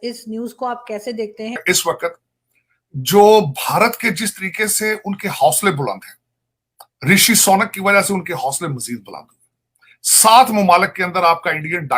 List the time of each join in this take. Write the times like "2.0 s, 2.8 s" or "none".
1.6 s